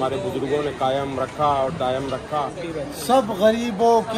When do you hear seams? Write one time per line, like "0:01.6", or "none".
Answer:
0:02.6